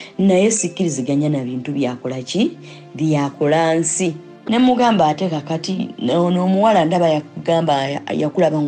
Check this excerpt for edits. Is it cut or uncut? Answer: cut